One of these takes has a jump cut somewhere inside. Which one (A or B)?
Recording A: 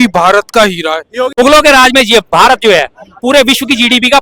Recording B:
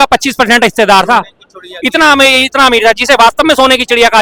A